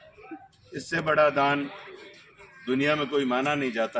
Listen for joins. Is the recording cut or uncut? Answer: uncut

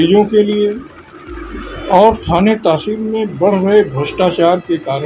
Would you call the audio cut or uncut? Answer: uncut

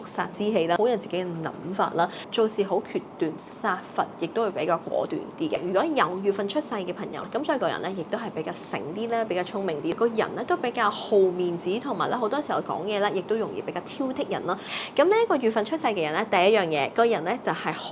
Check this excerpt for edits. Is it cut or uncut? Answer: cut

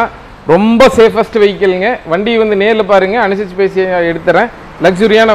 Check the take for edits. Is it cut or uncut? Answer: uncut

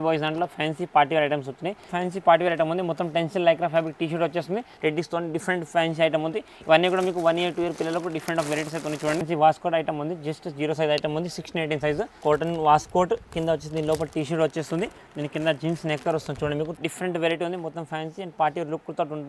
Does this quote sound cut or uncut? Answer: cut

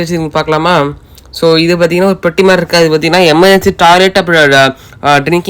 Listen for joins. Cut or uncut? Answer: uncut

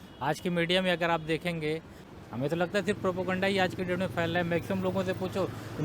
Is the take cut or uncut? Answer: cut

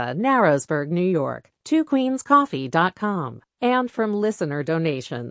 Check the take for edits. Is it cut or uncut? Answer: uncut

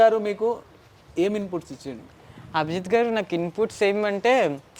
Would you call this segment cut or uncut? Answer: uncut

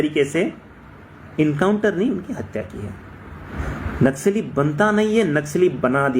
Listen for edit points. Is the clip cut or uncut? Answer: cut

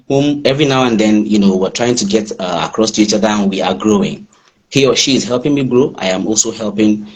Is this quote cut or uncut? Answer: cut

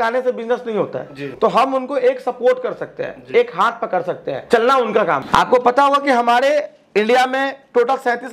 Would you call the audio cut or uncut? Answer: cut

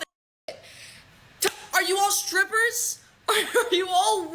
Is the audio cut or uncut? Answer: cut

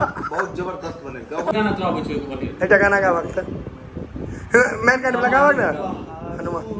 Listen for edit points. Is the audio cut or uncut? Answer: cut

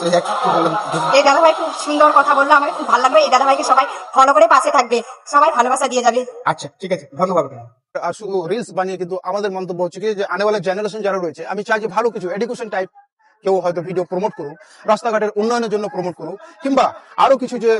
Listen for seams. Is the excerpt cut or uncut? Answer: cut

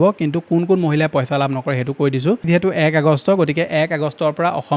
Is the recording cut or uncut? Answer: cut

